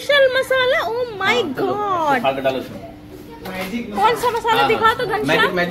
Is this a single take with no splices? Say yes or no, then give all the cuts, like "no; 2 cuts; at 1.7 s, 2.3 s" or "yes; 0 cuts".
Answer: yes; 0 cuts